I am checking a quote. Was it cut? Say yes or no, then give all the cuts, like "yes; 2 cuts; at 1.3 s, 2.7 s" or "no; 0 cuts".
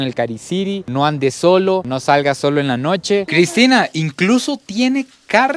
yes; 1 cut; at 3.3 s